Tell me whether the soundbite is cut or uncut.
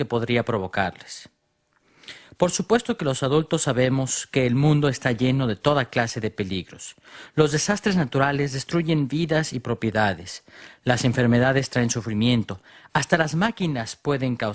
uncut